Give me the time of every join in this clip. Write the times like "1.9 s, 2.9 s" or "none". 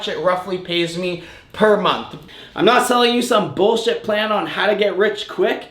2.2 s

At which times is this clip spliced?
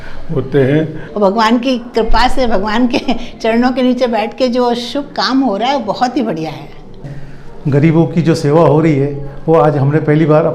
1.0 s, 7.0 s

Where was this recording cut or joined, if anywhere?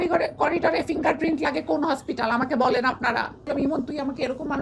3.5 s

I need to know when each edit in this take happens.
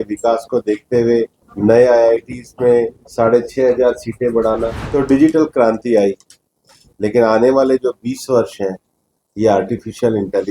1.4 s, 3.0 s, 4.8 s

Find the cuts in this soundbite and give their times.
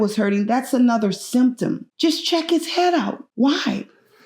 1.9 s, 3.2 s

